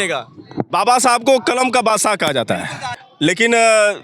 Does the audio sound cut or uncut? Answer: cut